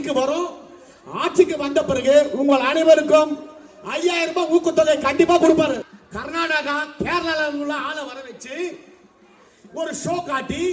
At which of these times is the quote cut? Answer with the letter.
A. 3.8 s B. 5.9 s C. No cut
B